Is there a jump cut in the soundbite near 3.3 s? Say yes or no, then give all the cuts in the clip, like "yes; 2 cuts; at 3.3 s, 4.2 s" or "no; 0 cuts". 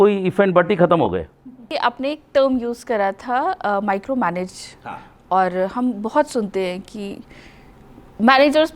no; 1 cut; at 1.6 s